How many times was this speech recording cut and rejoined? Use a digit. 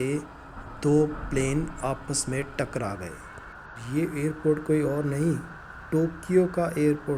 0